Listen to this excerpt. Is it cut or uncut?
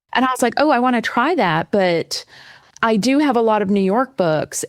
uncut